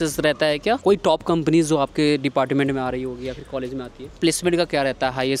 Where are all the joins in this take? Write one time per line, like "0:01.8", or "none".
0:00.8
0:04.2